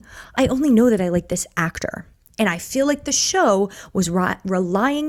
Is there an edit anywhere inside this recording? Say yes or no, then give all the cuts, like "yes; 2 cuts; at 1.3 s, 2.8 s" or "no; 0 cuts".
no; 0 cuts